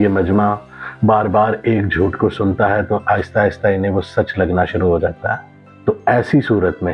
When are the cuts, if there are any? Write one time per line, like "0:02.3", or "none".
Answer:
none